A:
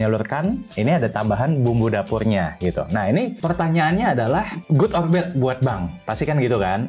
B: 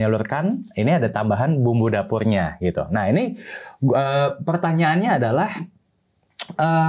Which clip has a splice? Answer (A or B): A